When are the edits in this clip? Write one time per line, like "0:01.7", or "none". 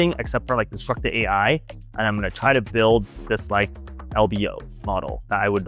none